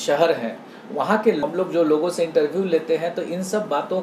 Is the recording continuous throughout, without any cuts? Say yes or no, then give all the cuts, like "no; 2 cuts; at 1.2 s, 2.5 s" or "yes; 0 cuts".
no; 1 cut; at 1.4 s